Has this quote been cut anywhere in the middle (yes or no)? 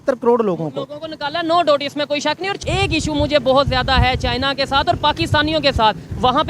yes